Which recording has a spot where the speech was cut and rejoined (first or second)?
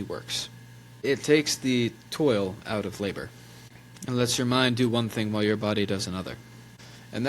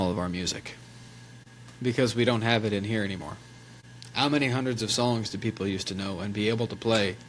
first